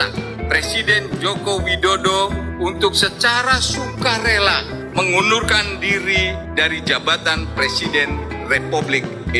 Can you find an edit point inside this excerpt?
no; 0 cuts

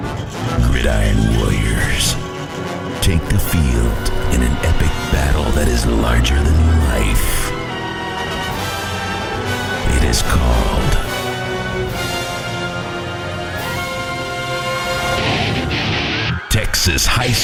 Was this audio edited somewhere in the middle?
no; 0 cuts

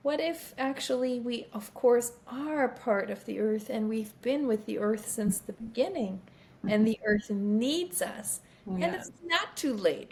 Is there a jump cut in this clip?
no; 0 cuts

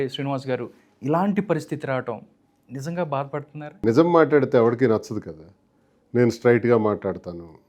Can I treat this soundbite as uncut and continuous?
no; 1 cut; at 3.7 s

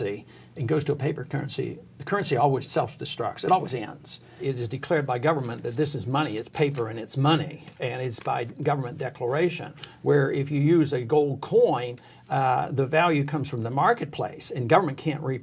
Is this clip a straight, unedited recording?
no; 2 cuts; at 2.7 s, 4.4 s

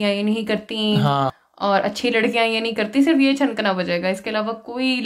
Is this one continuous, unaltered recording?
yes; 0 cuts

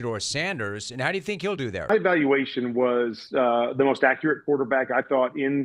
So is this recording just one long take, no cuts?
no; 1 cut; at 1.9 s

